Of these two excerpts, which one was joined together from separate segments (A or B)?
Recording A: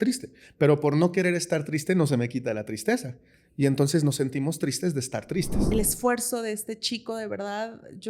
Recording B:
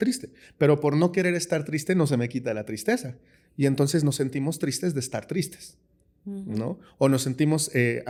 A